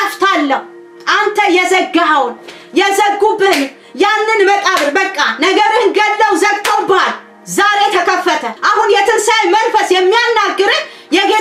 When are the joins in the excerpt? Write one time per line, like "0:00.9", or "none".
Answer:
0:08.5